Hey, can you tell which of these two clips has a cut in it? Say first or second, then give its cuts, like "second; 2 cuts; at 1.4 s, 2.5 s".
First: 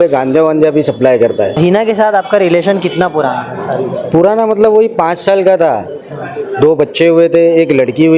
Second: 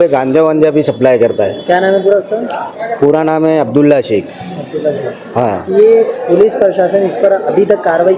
first; 1 cut; at 1.6 s